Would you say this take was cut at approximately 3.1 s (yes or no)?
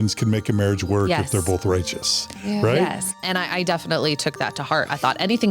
yes